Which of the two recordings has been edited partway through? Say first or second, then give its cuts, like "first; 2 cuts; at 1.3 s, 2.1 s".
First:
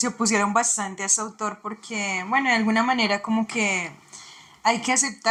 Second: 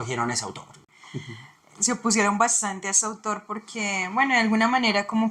second; 1 cut; at 0.9 s